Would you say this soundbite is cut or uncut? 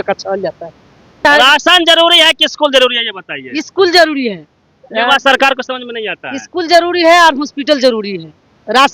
cut